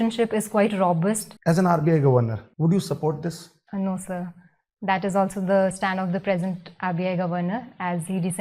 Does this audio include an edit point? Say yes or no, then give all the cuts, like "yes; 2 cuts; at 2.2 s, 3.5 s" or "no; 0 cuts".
yes; 3 cuts; at 1.3 s, 2.4 s, 3.5 s